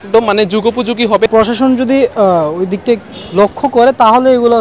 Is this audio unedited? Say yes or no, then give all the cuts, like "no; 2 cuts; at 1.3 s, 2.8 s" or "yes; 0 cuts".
no; 1 cut; at 1.3 s